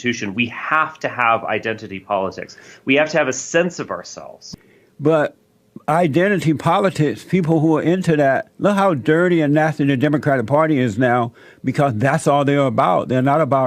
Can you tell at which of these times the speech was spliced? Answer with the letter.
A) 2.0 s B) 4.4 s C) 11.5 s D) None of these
B